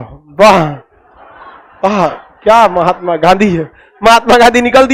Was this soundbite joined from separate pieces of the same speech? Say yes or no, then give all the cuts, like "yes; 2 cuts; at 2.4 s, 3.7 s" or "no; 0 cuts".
no; 0 cuts